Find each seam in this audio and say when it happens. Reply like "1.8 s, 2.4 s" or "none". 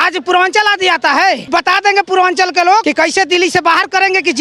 1.4 s, 2.8 s